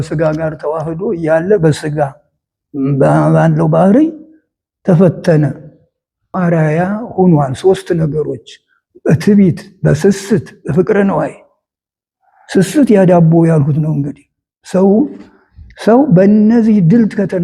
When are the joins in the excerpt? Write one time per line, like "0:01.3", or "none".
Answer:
0:06.3